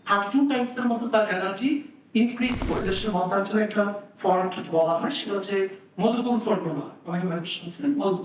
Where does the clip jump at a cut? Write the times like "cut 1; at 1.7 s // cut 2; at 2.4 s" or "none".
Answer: cut 1; at 2.9 s